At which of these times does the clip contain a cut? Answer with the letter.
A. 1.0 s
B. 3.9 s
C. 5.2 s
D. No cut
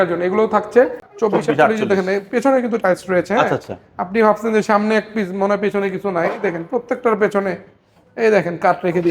A